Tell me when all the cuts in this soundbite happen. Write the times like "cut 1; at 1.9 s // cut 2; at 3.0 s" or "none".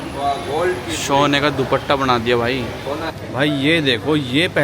cut 1; at 3.1 s